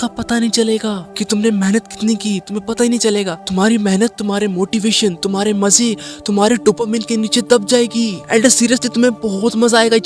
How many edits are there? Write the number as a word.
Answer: three